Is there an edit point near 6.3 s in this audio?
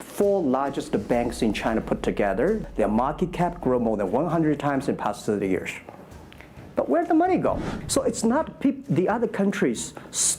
no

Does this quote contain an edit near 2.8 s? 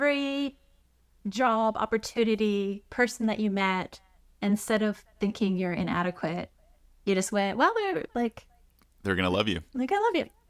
no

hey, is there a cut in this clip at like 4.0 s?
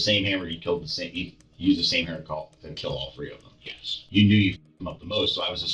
yes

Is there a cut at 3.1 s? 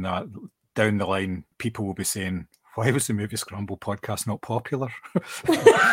no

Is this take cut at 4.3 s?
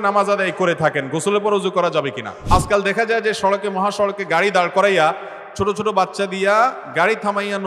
no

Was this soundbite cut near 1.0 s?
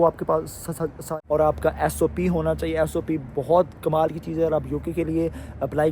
yes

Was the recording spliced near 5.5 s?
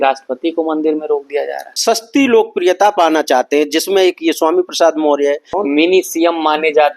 yes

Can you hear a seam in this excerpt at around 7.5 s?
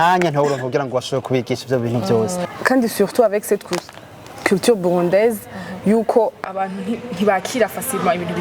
no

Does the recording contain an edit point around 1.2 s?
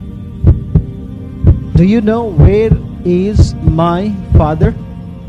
yes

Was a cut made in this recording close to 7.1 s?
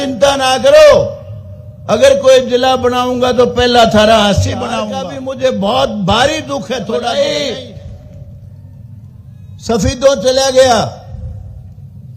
yes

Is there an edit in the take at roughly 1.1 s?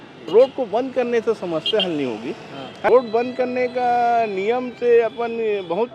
no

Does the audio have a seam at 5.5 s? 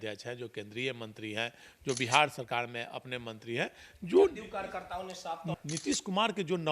yes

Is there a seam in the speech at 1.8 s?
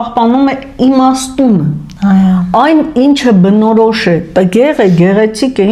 no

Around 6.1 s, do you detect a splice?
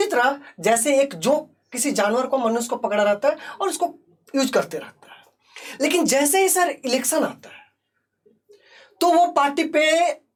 no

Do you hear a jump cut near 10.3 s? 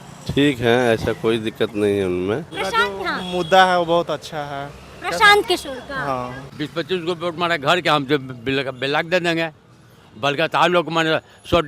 no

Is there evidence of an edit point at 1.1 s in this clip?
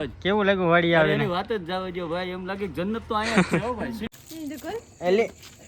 no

